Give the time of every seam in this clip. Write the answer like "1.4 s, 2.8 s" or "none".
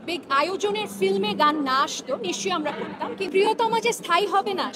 3.3 s